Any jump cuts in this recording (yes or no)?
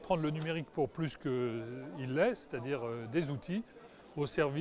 no